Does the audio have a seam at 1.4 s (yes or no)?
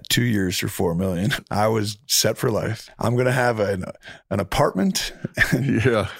yes